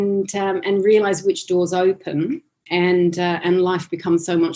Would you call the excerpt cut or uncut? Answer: uncut